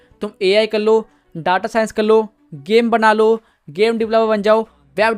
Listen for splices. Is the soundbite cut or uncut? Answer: uncut